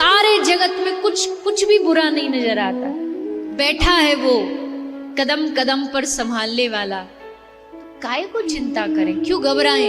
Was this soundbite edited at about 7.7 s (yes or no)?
no